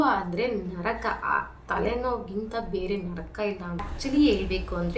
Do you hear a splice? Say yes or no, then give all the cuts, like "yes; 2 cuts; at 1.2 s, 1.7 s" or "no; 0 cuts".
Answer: yes; 1 cut; at 3.9 s